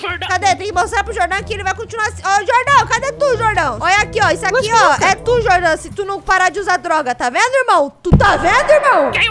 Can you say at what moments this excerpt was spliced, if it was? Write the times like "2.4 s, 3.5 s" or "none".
none